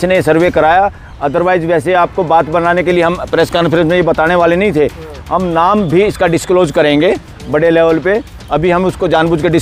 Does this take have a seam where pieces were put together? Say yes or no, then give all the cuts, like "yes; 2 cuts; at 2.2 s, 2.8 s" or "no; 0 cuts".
no; 0 cuts